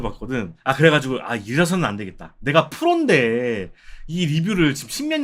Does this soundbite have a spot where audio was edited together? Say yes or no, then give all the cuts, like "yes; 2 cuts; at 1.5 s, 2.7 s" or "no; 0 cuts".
no; 0 cuts